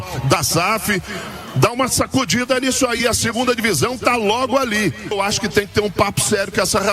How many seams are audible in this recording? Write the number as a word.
one